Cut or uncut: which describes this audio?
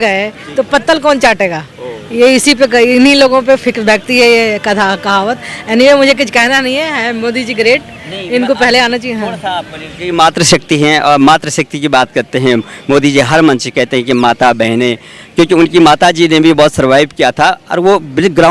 uncut